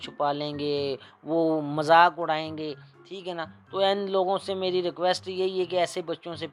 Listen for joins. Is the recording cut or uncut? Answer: uncut